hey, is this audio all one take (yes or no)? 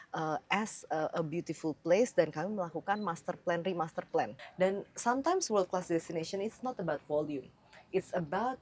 no